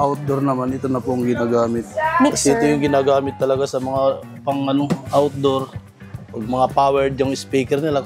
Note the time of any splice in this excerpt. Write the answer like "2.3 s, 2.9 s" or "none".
1.9 s